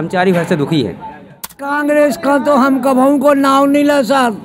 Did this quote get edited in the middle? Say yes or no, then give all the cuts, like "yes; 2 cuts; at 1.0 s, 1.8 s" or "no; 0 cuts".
yes; 1 cut; at 1.5 s